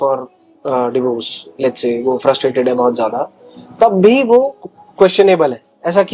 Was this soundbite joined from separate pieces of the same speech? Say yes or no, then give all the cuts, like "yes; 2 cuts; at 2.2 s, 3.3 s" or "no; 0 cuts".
no; 0 cuts